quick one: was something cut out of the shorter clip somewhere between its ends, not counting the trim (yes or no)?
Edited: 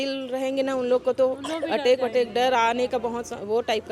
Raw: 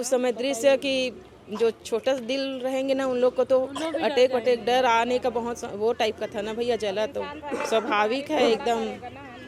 no